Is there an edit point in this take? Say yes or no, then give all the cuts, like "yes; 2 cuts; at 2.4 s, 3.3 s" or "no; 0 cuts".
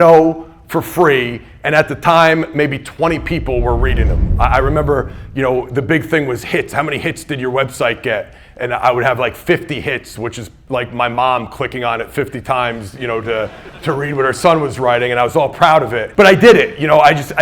yes; 1 cut; at 16.0 s